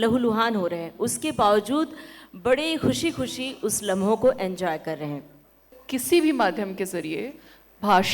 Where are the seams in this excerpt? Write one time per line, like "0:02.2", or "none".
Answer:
0:05.8